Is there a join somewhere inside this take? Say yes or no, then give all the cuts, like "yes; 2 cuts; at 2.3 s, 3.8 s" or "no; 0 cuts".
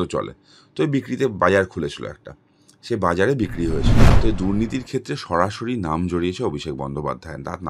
yes; 1 cut; at 4.0 s